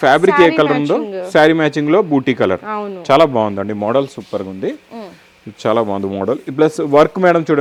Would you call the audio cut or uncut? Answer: uncut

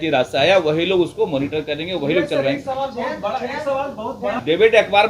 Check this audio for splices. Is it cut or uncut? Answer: uncut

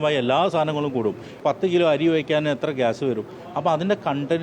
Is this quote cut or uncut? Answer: cut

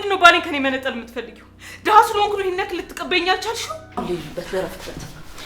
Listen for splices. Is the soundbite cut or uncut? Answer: cut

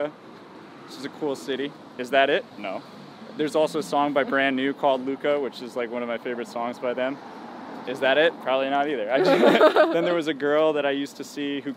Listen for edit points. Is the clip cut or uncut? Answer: uncut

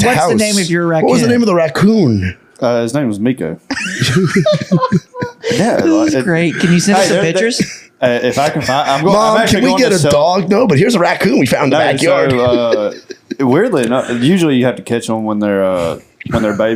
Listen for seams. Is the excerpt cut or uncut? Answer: uncut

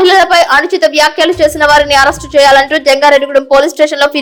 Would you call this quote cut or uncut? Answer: uncut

